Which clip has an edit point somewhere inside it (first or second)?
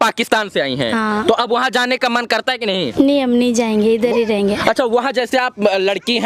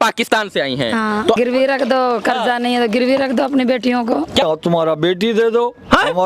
second